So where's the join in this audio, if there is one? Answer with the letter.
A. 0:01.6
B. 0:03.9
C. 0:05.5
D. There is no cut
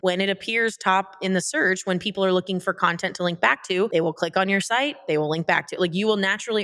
B